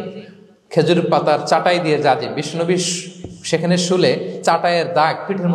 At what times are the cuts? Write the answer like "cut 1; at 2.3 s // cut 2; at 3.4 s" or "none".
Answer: none